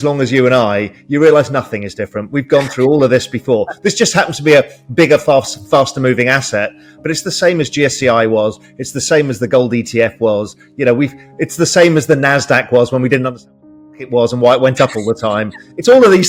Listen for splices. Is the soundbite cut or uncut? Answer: uncut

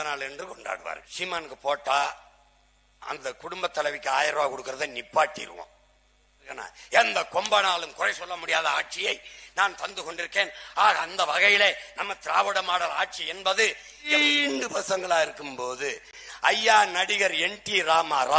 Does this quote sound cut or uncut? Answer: cut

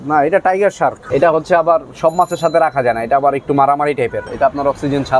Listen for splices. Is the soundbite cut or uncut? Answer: cut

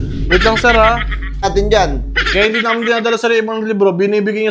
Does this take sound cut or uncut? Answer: cut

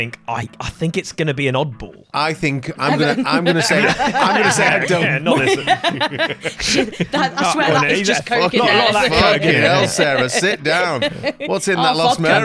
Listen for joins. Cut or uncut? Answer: uncut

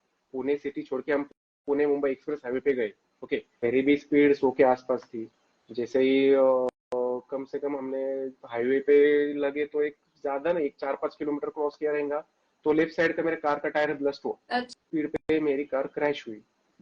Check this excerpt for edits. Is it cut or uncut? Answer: cut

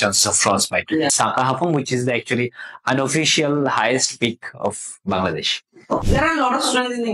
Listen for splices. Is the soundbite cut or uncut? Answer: cut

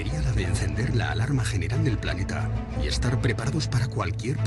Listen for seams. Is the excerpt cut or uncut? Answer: uncut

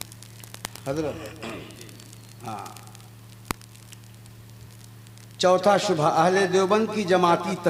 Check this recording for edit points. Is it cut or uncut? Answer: uncut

